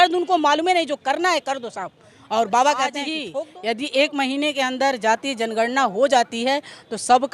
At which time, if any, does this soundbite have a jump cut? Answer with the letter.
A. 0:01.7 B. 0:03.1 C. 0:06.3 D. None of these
B